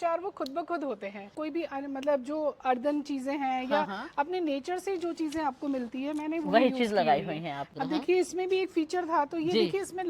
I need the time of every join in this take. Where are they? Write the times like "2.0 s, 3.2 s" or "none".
1.3 s, 7.6 s

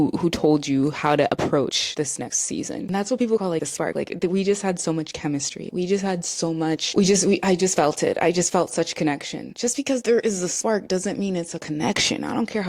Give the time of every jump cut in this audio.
2.8 s, 6.9 s

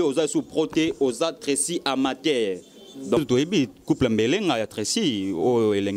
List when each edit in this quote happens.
3.2 s

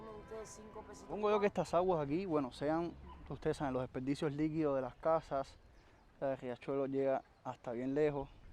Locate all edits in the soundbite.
1.1 s

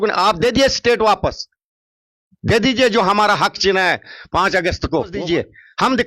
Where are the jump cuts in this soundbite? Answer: 5.2 s

